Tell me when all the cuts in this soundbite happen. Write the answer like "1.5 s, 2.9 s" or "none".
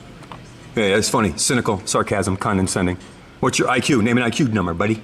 none